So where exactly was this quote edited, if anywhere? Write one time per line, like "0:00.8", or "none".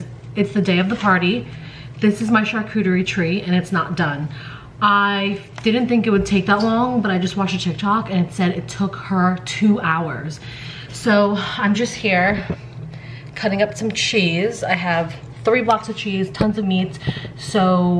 none